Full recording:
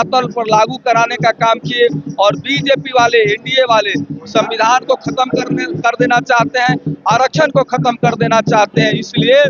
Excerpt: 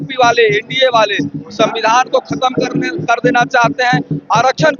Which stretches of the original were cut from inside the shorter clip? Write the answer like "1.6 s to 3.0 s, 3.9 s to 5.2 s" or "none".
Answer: none